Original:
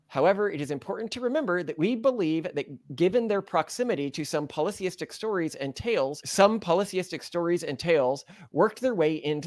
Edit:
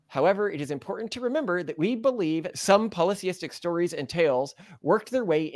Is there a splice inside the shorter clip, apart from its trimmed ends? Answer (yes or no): yes